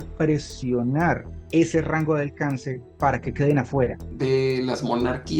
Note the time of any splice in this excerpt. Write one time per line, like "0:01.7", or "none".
0:01.3
0:04.1